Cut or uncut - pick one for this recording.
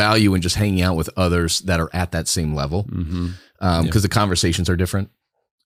uncut